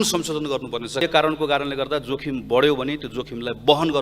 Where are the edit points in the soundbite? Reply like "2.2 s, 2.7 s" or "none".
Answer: 1.0 s